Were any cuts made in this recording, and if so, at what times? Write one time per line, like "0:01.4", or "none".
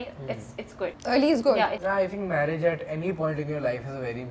0:01.0
0:01.8